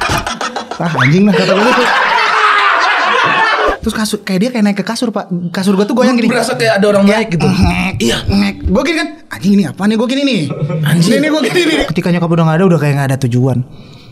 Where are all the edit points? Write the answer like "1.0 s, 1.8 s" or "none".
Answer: 3.7 s, 11.8 s

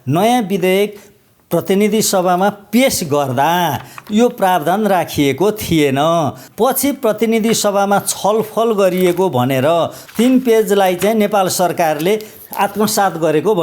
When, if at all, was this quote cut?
6.4 s, 10.0 s

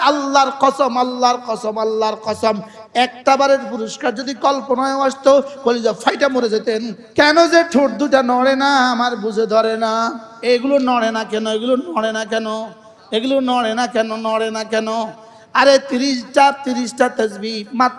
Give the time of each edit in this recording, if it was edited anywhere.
7.0 s, 10.3 s

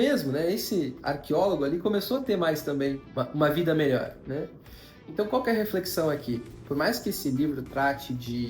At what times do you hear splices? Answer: 3.1 s

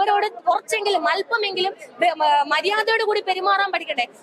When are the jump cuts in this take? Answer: none

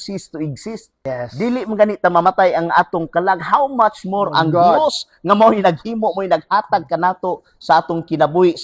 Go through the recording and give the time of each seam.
0.9 s

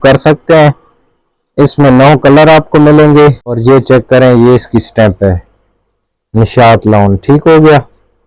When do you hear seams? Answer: 3.5 s

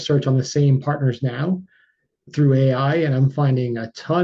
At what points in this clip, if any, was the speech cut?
none

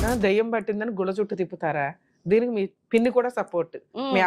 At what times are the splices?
2.8 s

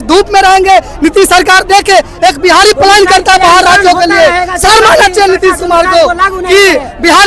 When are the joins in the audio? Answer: none

